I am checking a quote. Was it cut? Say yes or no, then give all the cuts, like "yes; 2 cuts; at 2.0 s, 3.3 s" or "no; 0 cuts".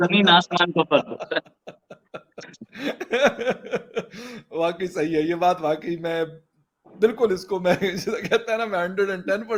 no; 0 cuts